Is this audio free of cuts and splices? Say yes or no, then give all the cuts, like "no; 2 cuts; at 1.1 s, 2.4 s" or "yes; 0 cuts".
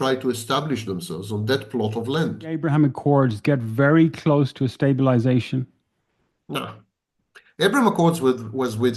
no; 1 cut; at 2.6 s